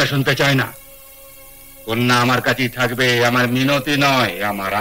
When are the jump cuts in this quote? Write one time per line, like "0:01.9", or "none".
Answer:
none